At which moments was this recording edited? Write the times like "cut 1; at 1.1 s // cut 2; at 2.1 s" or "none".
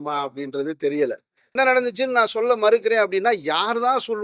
cut 1; at 1.5 s